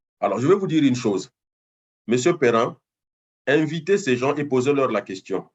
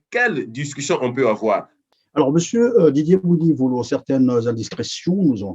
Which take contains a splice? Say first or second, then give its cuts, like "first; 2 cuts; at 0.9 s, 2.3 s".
second; 1 cut; at 1.8 s